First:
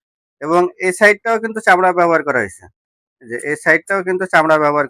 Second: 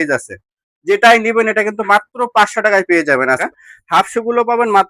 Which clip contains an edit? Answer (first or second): second